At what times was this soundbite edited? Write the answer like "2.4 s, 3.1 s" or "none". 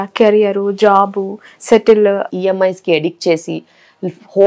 2.3 s